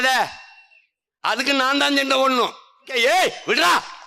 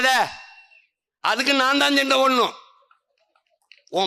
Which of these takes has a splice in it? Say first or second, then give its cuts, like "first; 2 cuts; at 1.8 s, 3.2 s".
first; 1 cut; at 2.9 s